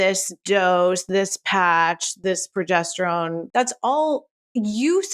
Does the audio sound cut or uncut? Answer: cut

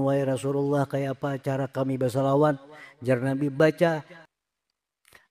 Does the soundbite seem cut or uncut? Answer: cut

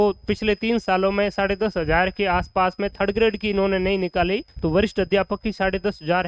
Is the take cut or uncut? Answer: cut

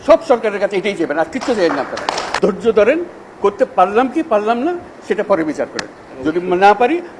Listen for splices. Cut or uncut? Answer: cut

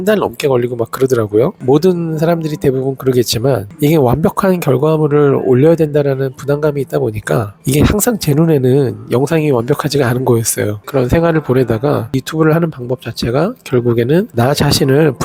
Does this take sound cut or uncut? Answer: uncut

